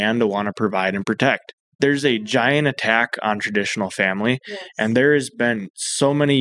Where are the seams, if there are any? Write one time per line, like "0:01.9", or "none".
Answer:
0:01.5